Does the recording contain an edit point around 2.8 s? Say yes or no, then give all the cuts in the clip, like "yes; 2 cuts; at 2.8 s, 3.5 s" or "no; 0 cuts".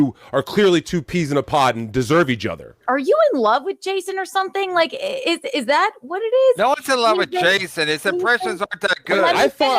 yes; 1 cut; at 2.8 s